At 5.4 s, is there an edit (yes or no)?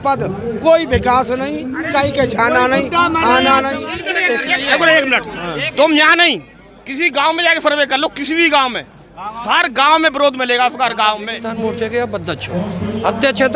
no